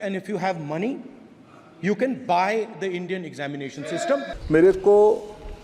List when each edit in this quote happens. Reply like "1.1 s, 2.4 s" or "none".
4.3 s